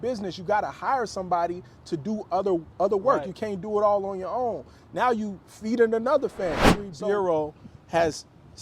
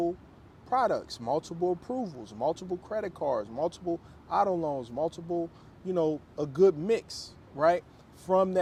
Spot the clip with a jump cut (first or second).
first